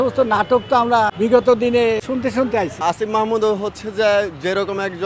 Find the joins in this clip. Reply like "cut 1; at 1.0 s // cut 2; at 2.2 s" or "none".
cut 1; at 1.1 s // cut 2; at 2.4 s